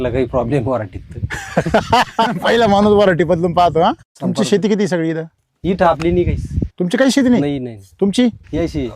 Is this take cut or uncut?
cut